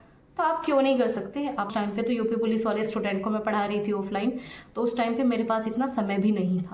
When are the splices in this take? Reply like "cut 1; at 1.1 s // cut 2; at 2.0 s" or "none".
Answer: cut 1; at 1.7 s